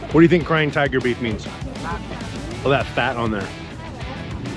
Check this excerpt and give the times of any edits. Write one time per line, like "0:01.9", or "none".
none